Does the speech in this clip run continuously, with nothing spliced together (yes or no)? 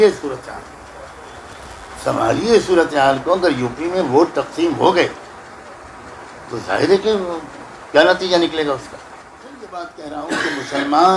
no